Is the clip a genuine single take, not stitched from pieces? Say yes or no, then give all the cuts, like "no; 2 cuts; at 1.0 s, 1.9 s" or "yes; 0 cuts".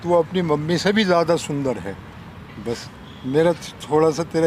yes; 0 cuts